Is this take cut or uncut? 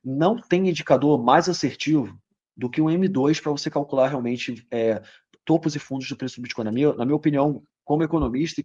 uncut